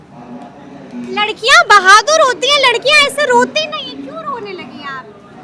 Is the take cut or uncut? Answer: uncut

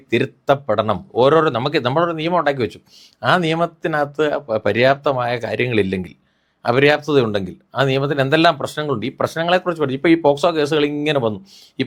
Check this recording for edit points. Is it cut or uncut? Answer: uncut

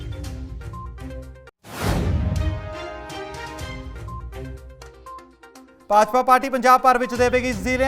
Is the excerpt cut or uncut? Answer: cut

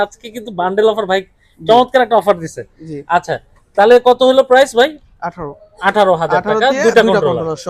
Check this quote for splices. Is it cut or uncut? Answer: uncut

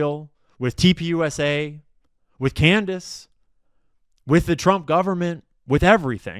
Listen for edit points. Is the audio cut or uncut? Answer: uncut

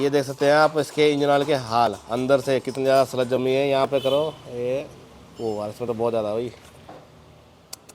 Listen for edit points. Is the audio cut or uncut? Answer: uncut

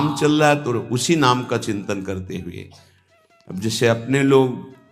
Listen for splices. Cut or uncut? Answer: uncut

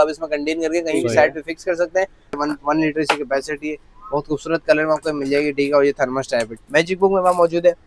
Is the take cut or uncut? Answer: cut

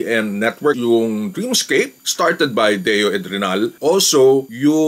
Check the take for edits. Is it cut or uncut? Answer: cut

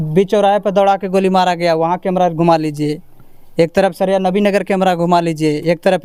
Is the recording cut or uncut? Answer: uncut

